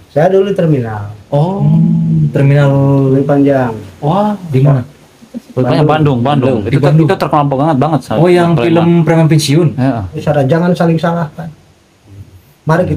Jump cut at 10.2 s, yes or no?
yes